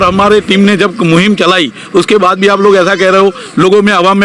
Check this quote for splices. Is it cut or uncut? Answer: uncut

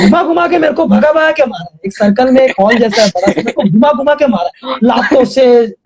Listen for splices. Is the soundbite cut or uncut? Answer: uncut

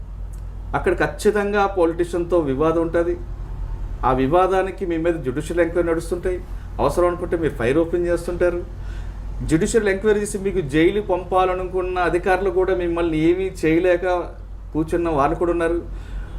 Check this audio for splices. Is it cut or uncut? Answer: uncut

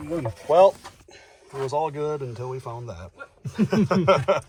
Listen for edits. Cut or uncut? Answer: uncut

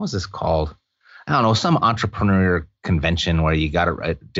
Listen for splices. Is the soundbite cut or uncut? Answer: uncut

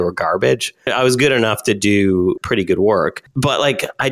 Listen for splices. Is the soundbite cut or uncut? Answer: cut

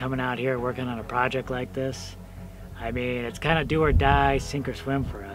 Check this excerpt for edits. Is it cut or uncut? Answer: uncut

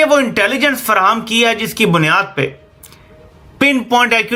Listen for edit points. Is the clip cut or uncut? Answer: uncut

